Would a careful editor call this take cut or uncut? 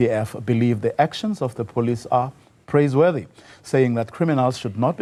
uncut